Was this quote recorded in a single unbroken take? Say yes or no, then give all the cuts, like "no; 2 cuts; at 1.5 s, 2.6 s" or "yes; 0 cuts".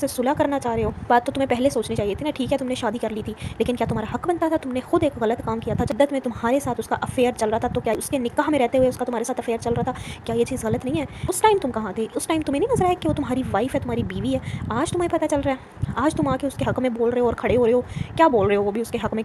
no; 4 cuts; at 1.1 s, 5.9 s, 7.9 s, 11.2 s